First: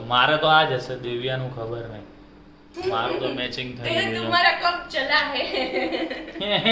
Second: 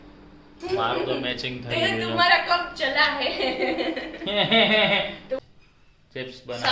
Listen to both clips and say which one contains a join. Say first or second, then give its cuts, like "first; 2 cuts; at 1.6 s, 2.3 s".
second; 1 cut; at 5.5 s